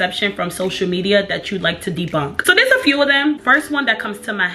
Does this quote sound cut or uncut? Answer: uncut